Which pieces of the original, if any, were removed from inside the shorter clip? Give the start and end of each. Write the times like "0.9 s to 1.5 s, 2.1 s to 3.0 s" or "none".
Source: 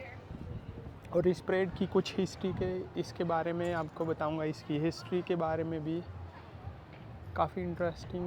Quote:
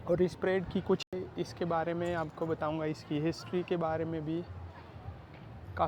2.1 s to 2.7 s